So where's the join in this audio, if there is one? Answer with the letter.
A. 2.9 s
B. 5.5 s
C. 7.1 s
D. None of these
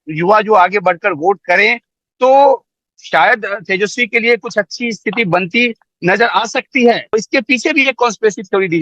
C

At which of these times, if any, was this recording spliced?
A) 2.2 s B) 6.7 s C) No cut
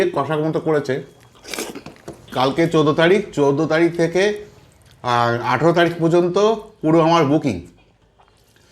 A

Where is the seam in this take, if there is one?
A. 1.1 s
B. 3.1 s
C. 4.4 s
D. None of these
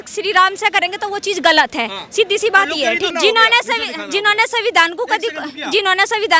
B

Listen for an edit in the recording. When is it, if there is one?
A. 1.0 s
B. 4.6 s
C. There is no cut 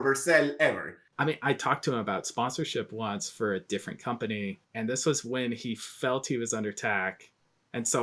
A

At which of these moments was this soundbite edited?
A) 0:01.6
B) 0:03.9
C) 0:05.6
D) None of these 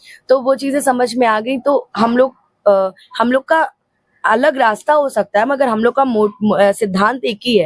D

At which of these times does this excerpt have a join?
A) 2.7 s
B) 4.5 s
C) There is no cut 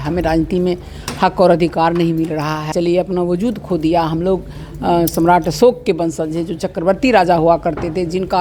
A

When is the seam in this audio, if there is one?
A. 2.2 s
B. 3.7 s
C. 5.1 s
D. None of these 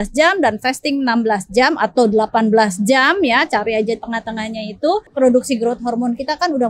C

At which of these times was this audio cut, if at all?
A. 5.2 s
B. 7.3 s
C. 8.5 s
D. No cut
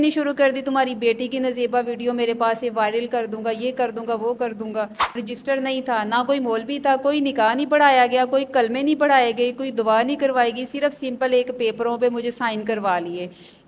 A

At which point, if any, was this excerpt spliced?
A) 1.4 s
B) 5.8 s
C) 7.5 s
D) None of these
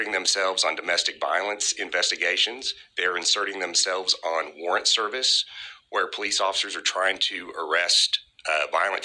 B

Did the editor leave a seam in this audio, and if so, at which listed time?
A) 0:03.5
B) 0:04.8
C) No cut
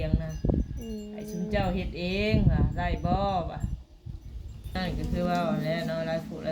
B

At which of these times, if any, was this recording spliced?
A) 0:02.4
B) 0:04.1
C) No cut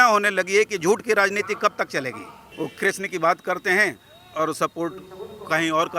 A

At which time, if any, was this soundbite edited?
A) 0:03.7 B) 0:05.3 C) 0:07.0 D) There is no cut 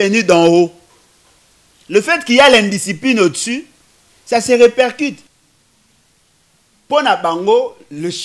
B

